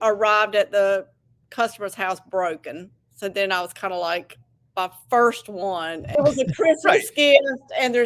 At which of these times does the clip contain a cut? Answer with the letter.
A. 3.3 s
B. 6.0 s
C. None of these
B